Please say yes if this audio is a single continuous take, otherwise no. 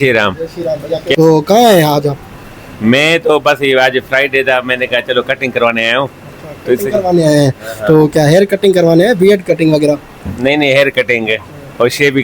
no